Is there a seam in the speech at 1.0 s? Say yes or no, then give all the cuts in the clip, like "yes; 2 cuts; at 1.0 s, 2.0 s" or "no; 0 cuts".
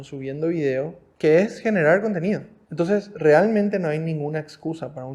yes; 2 cuts; at 1.0 s, 2.6 s